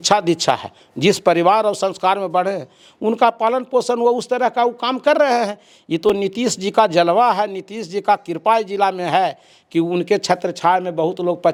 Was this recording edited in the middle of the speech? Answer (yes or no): no